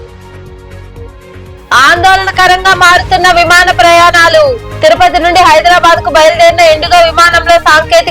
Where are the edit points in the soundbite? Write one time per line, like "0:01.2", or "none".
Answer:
0:01.1